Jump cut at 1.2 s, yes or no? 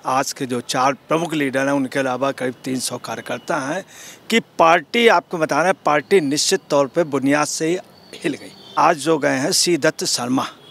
no